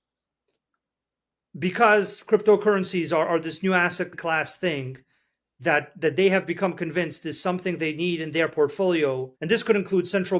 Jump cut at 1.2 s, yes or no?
no